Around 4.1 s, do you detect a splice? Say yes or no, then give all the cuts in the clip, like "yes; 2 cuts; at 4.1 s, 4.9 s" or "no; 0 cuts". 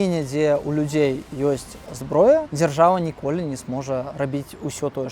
yes; 2 cuts; at 2.5 s, 4.1 s